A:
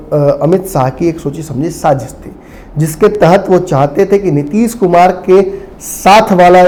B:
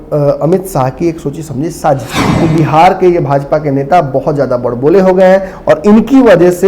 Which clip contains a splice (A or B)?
B